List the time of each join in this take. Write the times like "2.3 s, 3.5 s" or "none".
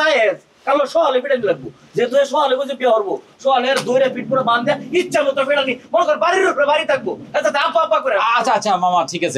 none